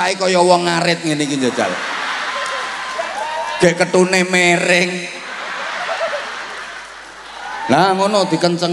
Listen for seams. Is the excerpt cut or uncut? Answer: uncut